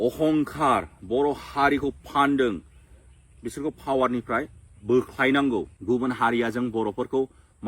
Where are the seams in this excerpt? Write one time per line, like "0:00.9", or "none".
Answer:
0:05.7